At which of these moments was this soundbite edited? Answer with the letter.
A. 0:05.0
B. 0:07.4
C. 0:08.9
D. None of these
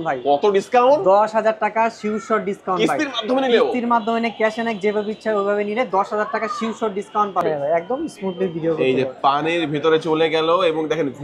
B